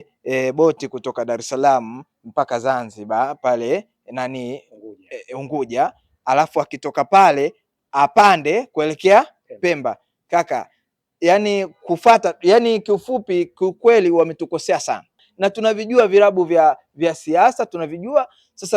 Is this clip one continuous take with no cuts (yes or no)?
no